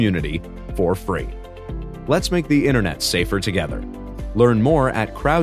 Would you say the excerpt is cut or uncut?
uncut